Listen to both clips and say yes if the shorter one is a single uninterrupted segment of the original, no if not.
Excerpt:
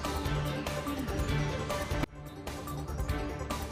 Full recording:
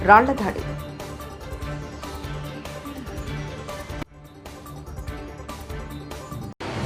yes